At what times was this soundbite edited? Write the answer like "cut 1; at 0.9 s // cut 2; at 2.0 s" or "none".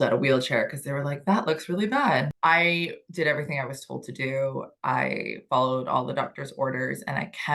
cut 1; at 2.3 s